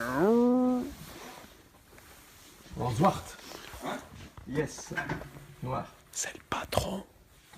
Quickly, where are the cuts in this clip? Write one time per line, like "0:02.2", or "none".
0:02.9